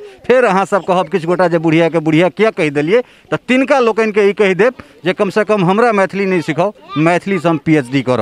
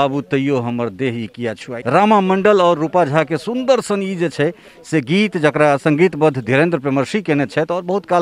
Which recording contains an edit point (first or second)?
second